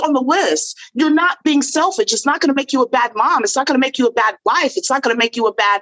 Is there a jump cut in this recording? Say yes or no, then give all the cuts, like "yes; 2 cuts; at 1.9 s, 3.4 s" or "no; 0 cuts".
no; 0 cuts